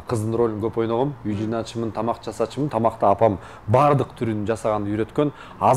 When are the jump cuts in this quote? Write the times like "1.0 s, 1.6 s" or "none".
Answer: none